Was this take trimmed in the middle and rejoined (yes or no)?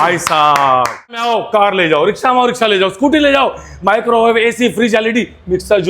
yes